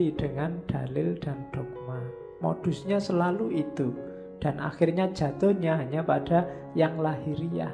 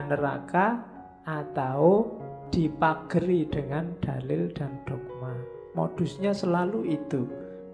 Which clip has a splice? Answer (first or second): second